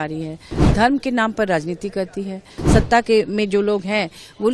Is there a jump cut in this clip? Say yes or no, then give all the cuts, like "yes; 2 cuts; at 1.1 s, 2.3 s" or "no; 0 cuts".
yes; 1 cut; at 2.5 s